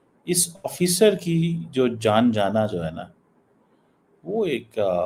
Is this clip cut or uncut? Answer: uncut